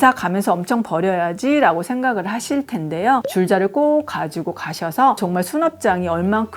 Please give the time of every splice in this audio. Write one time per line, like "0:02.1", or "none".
0:03.2

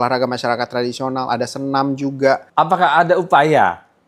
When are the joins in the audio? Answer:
0:02.5

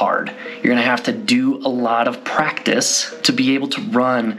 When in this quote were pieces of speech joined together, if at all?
0:03.0

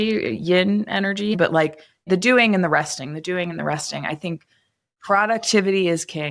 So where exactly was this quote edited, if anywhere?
0:01.4
0:04.9

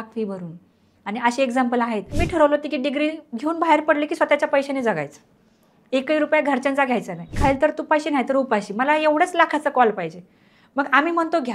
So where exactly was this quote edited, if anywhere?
0:02.2
0:07.3

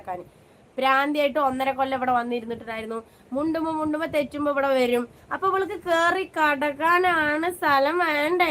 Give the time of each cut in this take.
none

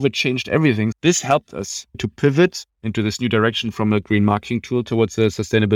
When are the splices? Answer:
0:00.9
0:02.0

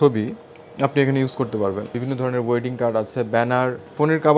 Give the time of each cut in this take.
0:02.0
0:03.3

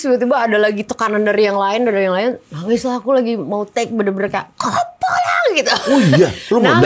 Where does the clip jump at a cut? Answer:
none

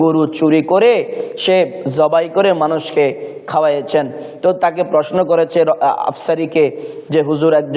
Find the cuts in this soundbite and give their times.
none

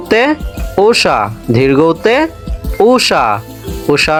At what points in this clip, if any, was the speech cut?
none

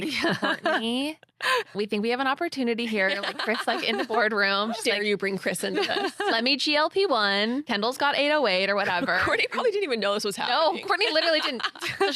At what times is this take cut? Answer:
0:01.7
0:07.6

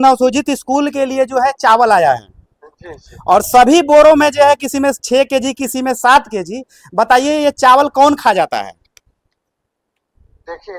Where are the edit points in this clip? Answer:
none

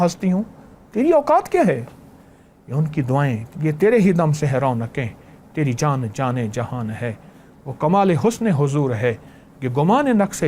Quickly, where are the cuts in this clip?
none

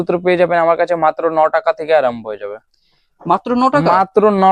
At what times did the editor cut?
none

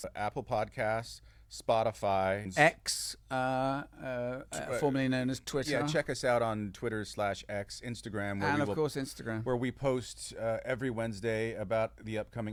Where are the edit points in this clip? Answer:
none

